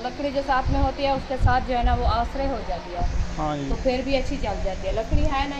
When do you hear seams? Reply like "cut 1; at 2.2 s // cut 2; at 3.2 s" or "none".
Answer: none